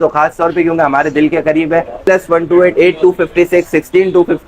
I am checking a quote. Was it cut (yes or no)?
yes